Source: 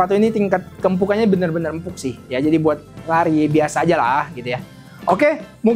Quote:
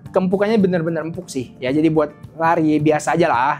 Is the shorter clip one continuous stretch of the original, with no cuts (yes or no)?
yes